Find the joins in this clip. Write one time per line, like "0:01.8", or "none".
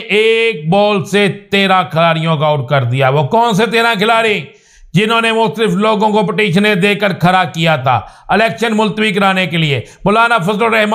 none